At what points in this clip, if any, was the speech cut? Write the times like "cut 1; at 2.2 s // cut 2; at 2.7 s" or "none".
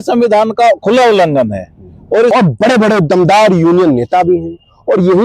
cut 1; at 2.3 s